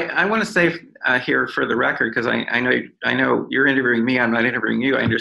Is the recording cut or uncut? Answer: uncut